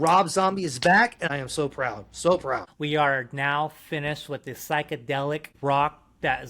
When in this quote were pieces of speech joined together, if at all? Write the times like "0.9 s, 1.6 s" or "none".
1.3 s, 2.7 s, 5.5 s